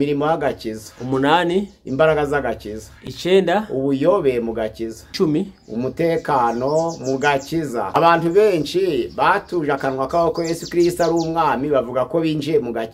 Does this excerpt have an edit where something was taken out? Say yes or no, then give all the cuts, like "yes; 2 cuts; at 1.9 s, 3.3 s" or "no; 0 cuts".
yes; 1 cut; at 7.9 s